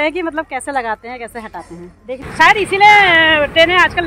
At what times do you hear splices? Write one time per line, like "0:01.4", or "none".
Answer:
0:02.2